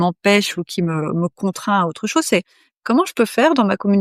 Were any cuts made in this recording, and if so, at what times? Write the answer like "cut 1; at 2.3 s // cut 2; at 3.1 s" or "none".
none